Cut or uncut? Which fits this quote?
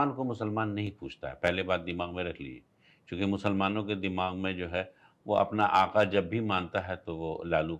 uncut